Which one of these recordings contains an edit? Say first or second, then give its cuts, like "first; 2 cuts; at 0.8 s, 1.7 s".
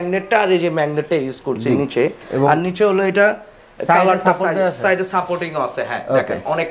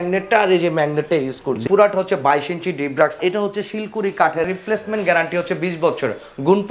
second; 3 cuts; at 1.6 s, 3.2 s, 4.5 s